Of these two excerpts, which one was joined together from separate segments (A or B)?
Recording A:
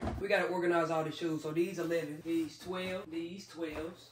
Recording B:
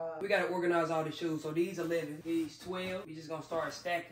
B